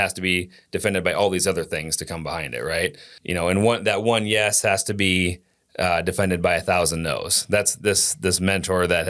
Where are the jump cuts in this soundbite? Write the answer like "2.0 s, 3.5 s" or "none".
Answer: 3.1 s